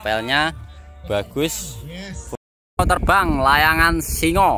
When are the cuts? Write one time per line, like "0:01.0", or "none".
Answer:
0:02.2